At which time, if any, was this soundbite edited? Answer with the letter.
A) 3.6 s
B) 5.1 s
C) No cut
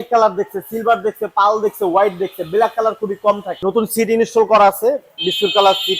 A